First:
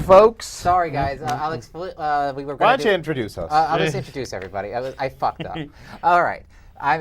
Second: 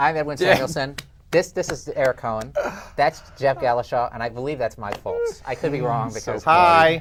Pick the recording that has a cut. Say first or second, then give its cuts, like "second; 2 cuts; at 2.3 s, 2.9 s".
first; 1 cut; at 5.8 s